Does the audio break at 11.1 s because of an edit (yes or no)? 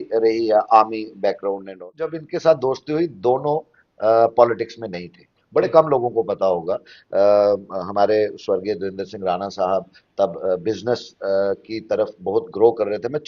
no